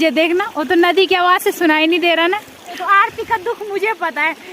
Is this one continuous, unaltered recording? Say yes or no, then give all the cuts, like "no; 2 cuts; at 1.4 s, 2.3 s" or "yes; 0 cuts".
no; 1 cut; at 2.8 s